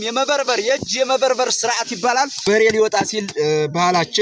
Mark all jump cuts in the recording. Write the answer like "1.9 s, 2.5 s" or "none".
2.4 s

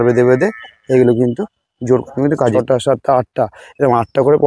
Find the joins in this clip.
2.5 s

